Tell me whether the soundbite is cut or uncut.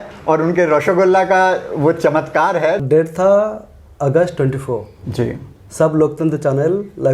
cut